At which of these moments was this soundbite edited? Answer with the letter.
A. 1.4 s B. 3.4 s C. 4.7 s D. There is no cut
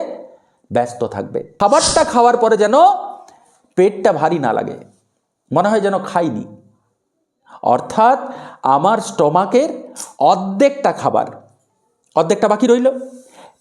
A